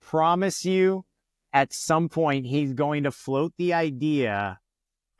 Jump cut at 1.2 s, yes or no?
no